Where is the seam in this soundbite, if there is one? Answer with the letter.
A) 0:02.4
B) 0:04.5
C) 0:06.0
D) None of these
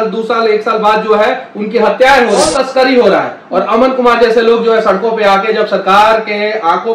A